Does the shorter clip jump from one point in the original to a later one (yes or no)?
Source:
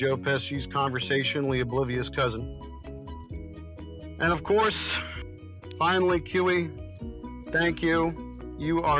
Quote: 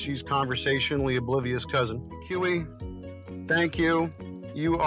yes